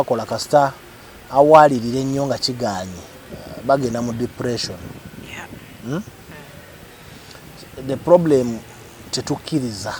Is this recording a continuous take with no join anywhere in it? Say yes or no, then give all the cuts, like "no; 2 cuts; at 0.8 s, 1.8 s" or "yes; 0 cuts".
yes; 0 cuts